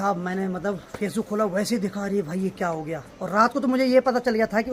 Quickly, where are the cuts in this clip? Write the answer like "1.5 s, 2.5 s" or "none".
none